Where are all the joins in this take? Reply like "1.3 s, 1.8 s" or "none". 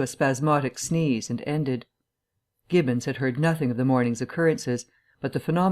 1.2 s